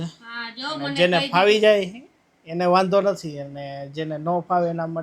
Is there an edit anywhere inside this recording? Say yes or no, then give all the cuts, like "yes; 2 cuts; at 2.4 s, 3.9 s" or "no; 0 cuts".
no; 0 cuts